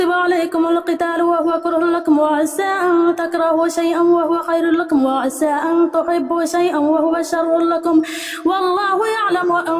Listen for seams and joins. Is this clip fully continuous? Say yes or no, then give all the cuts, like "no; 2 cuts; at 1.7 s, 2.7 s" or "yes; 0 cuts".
yes; 0 cuts